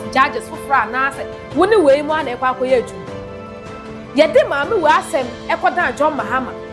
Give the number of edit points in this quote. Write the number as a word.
zero